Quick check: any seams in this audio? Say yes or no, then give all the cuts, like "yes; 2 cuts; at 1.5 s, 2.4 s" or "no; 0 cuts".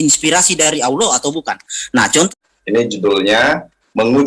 yes; 1 cut; at 2.3 s